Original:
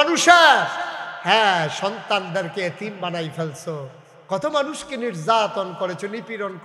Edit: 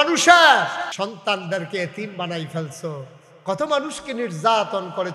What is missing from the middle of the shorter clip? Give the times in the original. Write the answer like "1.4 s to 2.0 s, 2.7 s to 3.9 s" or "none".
0.9 s to 1.8 s